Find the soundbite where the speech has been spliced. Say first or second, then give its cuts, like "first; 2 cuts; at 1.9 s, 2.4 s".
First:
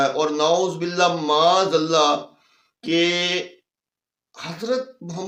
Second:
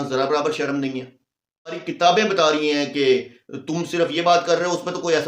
second; 1 cut; at 1.9 s